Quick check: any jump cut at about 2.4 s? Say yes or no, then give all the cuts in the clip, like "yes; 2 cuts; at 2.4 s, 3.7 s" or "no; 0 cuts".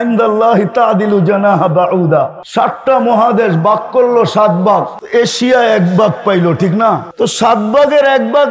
yes; 3 cuts; at 2.4 s, 5.0 s, 7.1 s